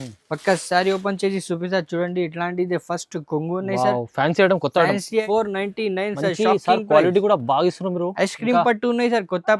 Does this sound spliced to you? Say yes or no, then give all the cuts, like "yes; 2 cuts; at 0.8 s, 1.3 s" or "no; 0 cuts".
yes; 1 cut; at 5.2 s